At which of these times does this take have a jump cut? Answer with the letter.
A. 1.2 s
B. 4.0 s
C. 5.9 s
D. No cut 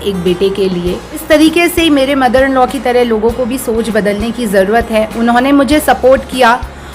A